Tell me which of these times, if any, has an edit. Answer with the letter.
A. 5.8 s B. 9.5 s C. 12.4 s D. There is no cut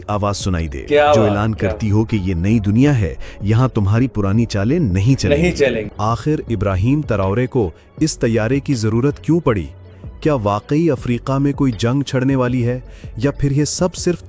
A